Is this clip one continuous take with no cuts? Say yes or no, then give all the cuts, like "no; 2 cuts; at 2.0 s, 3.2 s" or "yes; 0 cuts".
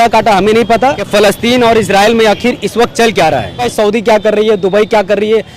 no; 2 cuts; at 1.0 s, 3.7 s